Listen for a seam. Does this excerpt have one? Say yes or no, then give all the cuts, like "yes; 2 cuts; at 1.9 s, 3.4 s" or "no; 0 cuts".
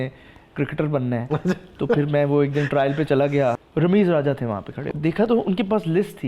yes; 2 cuts; at 3.6 s, 4.9 s